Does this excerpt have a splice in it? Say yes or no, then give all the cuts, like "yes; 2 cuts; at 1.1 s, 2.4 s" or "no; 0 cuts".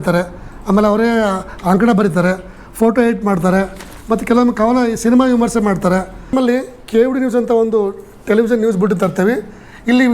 yes; 1 cut; at 6.3 s